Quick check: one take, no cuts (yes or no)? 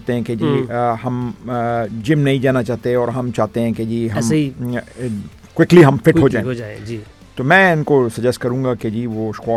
yes